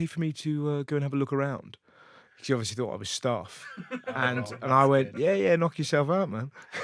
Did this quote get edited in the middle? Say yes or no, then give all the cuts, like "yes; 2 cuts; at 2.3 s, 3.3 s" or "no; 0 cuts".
no; 0 cuts